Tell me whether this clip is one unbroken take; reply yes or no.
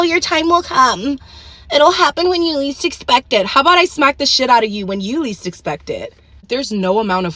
no